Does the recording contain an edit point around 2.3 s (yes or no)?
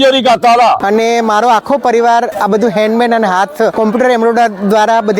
yes